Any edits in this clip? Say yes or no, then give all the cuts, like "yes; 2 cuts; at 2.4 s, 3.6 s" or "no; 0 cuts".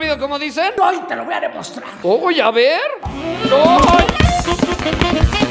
no; 0 cuts